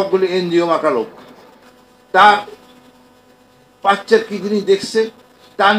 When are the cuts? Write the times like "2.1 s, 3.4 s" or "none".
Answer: none